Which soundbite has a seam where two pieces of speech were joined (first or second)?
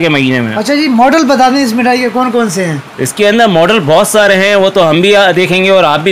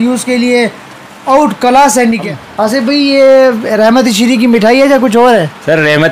second